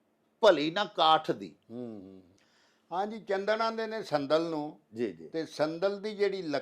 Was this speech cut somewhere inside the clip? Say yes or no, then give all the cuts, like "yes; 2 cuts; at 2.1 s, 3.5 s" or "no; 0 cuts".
no; 0 cuts